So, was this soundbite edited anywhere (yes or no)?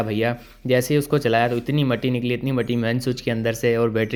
no